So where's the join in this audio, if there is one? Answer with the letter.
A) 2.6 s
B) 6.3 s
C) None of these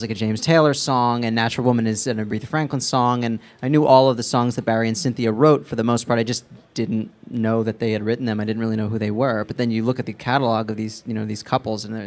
A